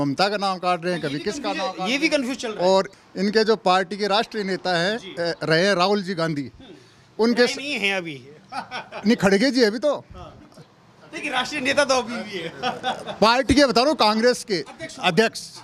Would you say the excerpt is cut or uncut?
uncut